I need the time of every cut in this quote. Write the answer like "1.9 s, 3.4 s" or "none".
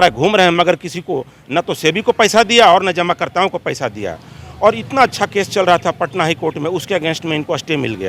none